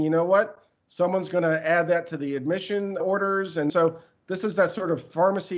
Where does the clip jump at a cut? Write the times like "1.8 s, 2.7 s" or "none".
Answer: 3.7 s